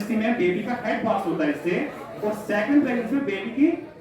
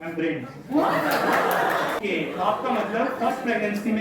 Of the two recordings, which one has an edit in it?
second; 1 cut; at 2.0 s

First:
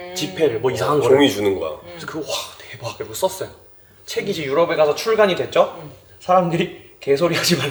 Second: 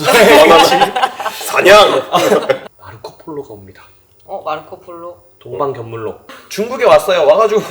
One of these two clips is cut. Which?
second; 1 cut; at 2.7 s

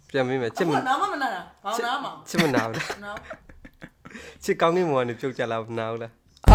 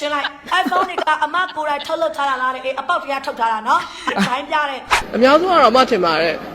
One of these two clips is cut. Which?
second; 1 cut; at 5.1 s

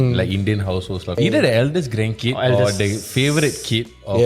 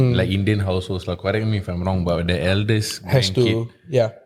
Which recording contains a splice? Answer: first; 1 cut; at 1.2 s

